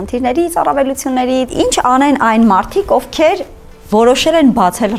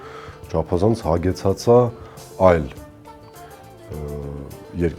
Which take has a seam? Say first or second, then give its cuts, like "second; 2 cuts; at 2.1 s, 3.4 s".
first; 1 cut; at 1.5 s